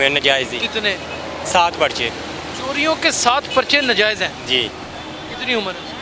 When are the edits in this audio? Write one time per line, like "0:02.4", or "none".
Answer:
none